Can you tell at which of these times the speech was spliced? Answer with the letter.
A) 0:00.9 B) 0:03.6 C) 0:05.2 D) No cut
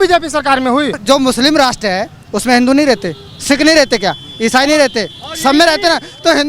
A